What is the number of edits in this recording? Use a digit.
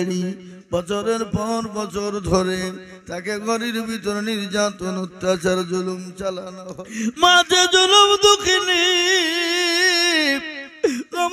1